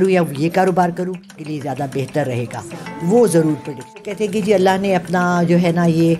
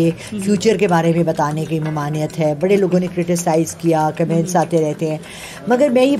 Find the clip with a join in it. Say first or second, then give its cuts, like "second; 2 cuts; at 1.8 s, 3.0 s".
first; 2 cuts; at 1.4 s, 4.2 s